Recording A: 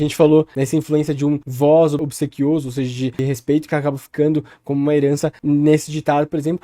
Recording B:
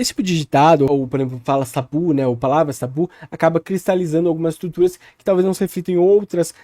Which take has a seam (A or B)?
A